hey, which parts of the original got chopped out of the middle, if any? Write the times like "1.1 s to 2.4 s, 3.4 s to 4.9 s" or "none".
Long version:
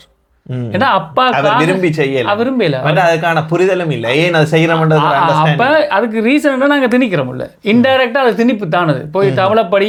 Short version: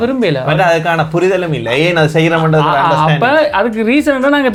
none